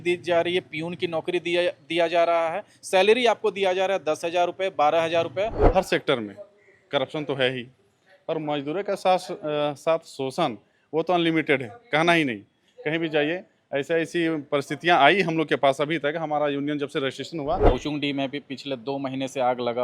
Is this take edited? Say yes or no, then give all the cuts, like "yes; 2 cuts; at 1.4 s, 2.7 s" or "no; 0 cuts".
yes; 2 cuts; at 5.6 s, 17.7 s